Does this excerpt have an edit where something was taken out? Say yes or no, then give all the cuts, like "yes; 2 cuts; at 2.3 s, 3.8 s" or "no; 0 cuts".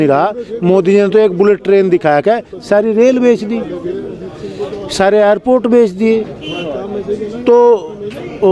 no; 0 cuts